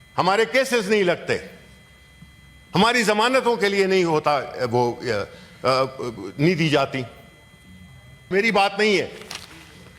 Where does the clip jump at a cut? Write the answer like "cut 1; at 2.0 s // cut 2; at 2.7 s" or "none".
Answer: cut 1; at 8.3 s